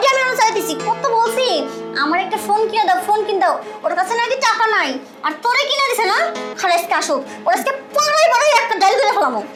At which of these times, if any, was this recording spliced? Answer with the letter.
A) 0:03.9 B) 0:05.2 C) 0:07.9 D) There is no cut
D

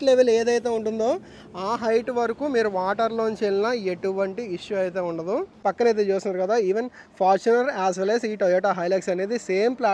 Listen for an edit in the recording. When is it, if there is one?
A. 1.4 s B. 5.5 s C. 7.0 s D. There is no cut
B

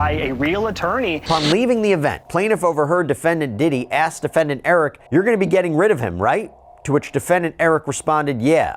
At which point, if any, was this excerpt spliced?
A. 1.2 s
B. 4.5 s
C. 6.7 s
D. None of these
A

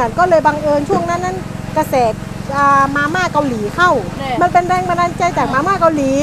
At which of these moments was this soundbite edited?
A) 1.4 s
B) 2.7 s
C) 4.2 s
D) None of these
C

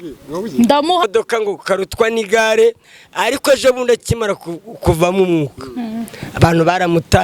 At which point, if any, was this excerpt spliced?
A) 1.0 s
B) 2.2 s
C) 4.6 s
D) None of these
A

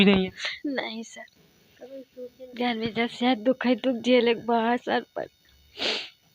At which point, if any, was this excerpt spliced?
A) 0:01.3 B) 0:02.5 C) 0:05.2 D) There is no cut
B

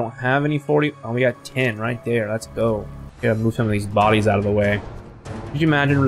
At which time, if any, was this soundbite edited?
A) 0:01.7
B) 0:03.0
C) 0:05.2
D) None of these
B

